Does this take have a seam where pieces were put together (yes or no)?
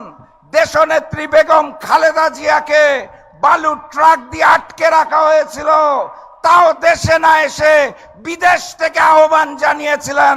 no